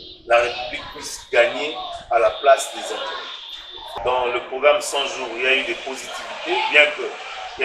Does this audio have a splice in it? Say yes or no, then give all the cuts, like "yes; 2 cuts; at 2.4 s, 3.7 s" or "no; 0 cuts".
yes; 1 cut; at 4.0 s